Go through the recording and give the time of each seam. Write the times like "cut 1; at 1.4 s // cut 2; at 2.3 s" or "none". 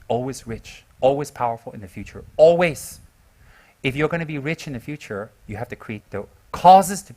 cut 1; at 6.0 s